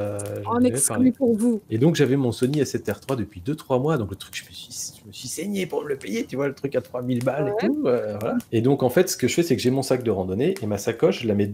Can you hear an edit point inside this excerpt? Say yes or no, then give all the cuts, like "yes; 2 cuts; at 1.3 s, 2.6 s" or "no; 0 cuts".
yes; 1 cut; at 1.6 s